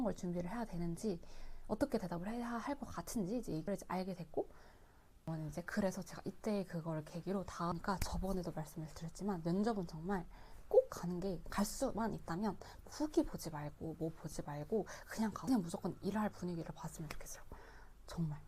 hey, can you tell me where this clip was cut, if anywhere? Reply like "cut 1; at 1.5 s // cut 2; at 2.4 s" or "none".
cut 1; at 7.7 s